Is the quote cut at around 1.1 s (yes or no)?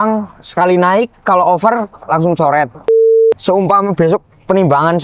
no